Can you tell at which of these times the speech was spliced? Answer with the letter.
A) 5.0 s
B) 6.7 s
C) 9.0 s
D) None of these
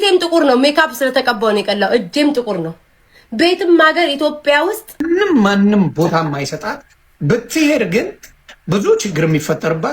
A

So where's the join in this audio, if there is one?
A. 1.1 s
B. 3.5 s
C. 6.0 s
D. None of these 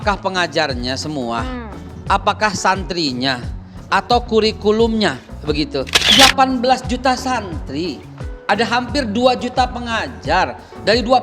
C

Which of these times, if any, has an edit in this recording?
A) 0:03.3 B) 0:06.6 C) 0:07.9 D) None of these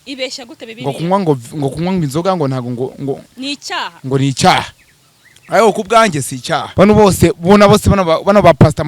B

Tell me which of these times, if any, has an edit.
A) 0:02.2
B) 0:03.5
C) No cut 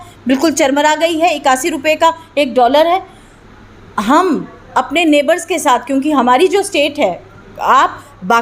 C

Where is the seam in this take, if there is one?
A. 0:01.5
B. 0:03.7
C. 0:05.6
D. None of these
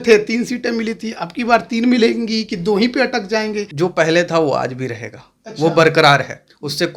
B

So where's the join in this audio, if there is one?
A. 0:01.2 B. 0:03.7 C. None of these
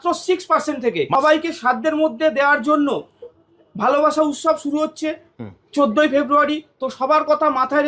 A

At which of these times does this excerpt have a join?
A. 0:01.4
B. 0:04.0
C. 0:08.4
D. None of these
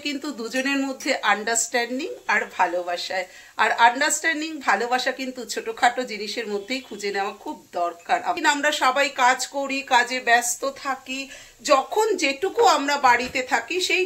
C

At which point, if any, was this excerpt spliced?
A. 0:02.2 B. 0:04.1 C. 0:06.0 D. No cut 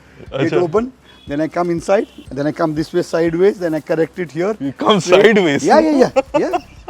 A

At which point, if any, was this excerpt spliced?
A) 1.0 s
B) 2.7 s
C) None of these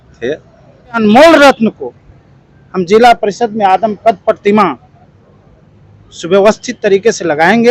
A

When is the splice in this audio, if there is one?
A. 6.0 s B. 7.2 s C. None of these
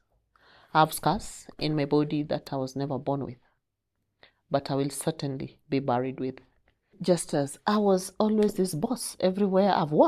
B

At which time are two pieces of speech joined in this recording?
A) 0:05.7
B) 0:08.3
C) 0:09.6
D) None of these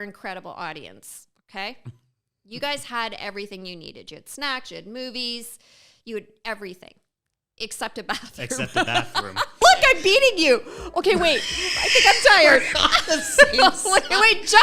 C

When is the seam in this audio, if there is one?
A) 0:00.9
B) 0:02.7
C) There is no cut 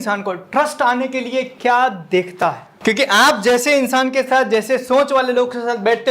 B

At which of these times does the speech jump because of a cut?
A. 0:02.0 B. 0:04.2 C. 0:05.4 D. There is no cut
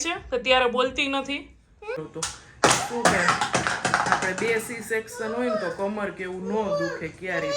A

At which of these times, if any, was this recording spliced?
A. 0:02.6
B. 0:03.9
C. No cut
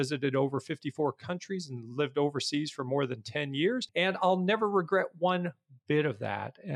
B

